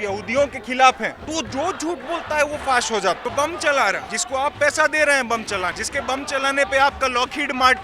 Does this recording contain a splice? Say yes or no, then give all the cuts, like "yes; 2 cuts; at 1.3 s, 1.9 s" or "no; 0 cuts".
yes; 4 cuts; at 1.2 s, 3.2 s, 4.1 s, 5.8 s